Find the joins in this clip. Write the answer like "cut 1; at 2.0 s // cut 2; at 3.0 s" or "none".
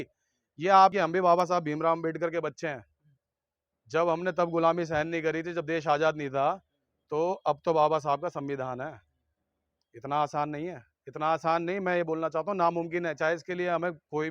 cut 1; at 0.9 s

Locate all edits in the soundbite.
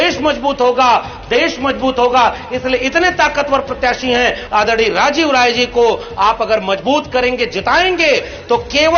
cut 1; at 4.4 s

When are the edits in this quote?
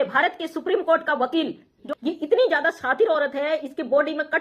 cut 1; at 1.8 s

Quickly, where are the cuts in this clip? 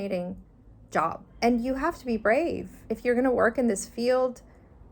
cut 1; at 1.3 s // cut 2; at 2.8 s

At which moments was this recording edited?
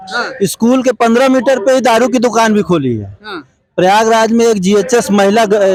none

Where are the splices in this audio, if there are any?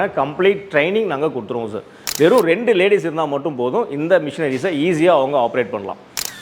cut 1; at 2.0 s

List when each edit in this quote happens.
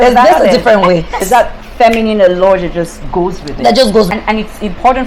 cut 1; at 1.3 s // cut 2; at 4.1 s

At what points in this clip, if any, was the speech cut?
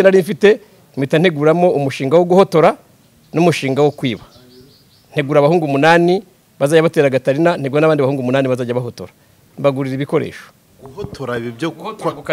none

